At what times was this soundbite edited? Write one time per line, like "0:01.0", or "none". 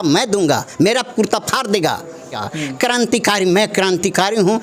0:02.5